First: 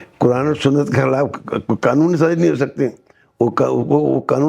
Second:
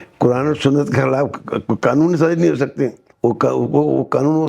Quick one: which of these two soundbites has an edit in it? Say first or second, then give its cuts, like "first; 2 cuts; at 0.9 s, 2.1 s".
second; 1 cut; at 3.0 s